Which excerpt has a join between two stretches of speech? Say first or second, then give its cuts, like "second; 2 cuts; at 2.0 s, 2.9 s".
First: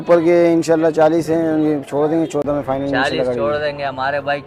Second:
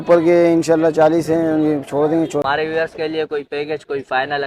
second; 1 cut; at 2.4 s